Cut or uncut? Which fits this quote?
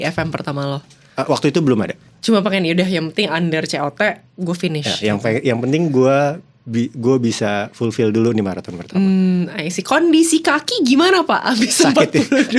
uncut